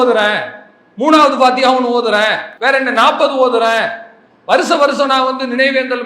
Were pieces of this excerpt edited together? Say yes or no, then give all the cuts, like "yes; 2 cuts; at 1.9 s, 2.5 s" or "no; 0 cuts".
yes; 1 cut; at 2.5 s